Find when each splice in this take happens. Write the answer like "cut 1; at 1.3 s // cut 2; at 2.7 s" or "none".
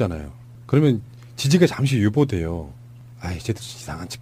none